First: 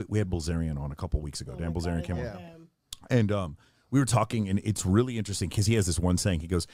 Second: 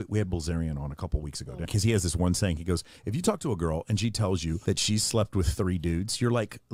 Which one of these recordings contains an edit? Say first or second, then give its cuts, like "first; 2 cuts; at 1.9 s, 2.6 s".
second; 2 cuts; at 1.7 s, 4.6 s